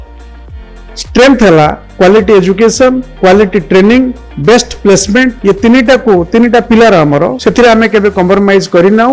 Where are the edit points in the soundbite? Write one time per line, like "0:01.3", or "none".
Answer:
0:01.8
0:03.1
0:04.3
0:05.4
0:07.4